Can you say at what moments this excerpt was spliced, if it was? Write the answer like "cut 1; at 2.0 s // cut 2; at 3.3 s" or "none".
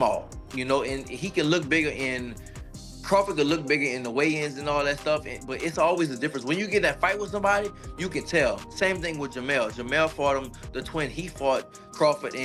none